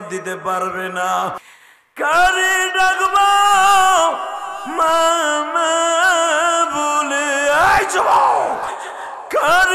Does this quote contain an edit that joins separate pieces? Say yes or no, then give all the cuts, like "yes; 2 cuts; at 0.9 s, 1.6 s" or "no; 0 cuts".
yes; 1 cut; at 1.5 s